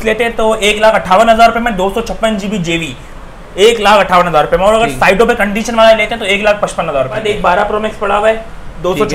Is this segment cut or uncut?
cut